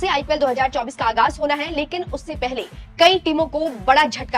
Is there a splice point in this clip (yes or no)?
no